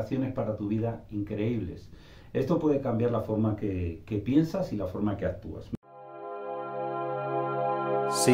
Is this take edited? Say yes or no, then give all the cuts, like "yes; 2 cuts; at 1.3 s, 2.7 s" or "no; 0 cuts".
yes; 1 cut; at 5.5 s